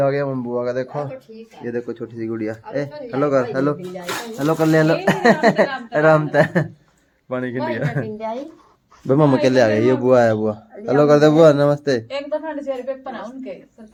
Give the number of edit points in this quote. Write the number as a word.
zero